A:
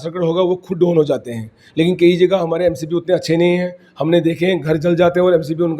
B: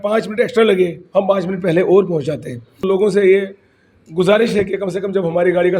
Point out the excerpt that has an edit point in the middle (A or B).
B